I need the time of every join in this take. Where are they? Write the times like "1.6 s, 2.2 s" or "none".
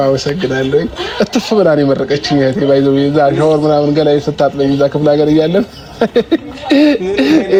none